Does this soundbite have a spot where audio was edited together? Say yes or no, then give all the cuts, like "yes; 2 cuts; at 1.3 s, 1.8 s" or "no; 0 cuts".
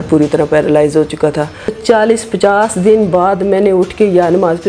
yes; 1 cut; at 1.8 s